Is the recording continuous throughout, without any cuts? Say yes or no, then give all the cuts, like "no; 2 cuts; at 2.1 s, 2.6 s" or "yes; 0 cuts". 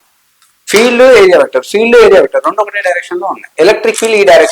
no; 1 cut; at 3.5 s